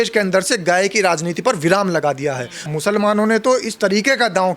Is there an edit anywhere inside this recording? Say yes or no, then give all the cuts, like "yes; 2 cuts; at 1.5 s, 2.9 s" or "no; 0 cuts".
yes; 1 cut; at 2.5 s